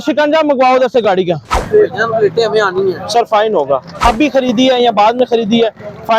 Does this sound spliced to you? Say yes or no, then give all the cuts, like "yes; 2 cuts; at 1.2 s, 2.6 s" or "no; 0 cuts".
yes; 2 cuts; at 1.5 s, 4.0 s